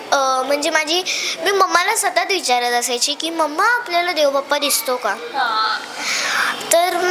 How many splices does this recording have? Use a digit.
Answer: 0